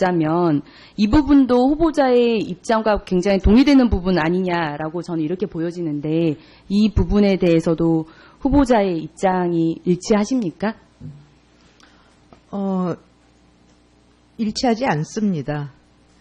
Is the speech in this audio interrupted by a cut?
no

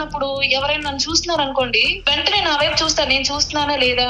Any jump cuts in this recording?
yes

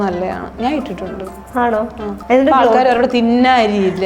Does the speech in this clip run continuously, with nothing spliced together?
no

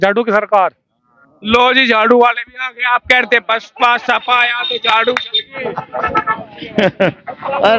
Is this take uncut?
yes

